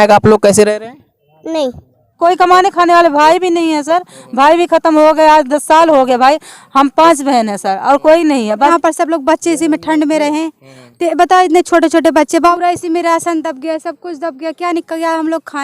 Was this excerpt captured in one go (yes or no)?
no